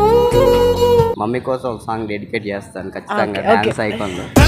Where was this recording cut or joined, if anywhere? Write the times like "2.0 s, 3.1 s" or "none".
1.1 s